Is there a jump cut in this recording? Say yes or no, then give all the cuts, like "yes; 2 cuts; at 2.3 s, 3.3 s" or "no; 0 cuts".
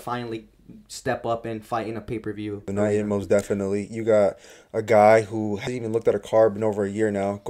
yes; 2 cuts; at 2.7 s, 5.6 s